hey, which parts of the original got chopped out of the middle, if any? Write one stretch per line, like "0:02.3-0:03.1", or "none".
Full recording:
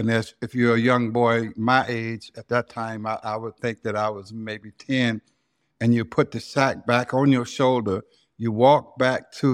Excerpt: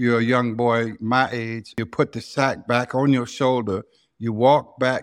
0:02.4-0:06.0